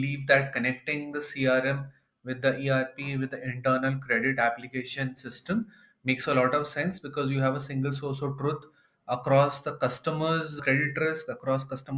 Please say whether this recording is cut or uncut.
uncut